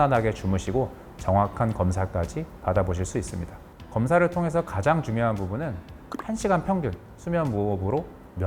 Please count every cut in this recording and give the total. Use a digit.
0